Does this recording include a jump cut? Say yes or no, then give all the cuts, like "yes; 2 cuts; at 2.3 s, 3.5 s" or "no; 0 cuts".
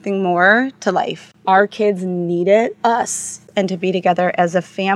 yes; 2 cuts; at 1.3 s, 3.4 s